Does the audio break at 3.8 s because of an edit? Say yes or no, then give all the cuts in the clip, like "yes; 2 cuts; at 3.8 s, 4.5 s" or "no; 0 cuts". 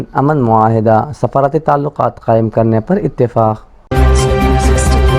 yes; 1 cut; at 3.8 s